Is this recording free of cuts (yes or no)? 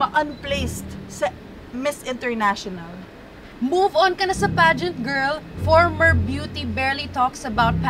no